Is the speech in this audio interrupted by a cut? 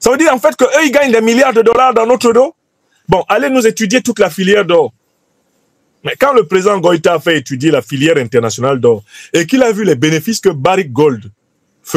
no; 0 cuts

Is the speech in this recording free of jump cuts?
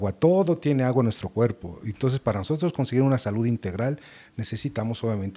yes; 0 cuts

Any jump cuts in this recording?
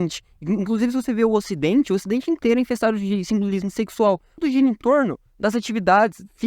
yes; 1 cut; at 4.4 s

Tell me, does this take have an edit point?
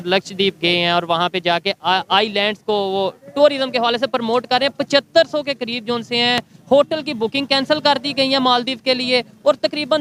no; 0 cuts

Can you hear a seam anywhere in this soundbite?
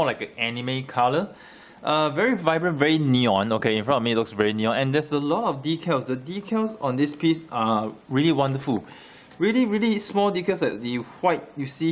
no; 0 cuts

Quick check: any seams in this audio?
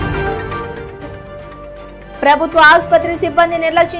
no; 0 cuts

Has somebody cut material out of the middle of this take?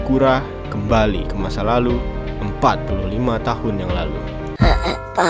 yes; 1 cut; at 4.4 s

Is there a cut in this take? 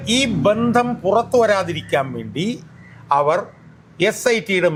no; 0 cuts

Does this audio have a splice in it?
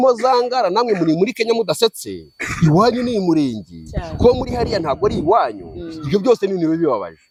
no; 0 cuts

